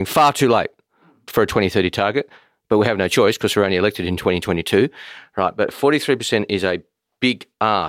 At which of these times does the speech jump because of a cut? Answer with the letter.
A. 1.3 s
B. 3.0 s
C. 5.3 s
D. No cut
D